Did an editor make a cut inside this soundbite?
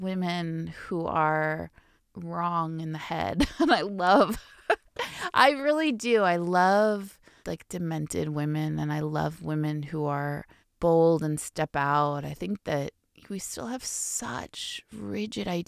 no; 0 cuts

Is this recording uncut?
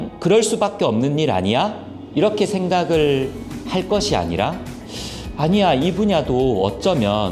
yes; 0 cuts

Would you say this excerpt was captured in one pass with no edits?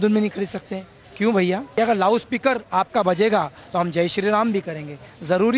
no; 1 cut; at 1.7 s

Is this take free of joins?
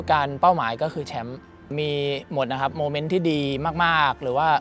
no; 1 cut; at 1.7 s

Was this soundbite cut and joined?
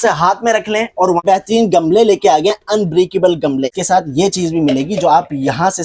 yes; 2 cuts; at 1.2 s, 3.8 s

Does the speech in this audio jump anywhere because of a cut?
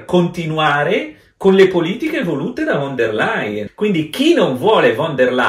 yes; 1 cut; at 3.7 s

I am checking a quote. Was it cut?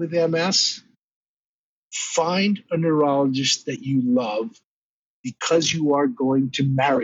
no; 0 cuts

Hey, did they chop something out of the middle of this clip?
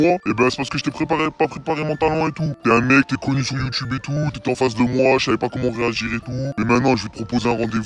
no; 0 cuts

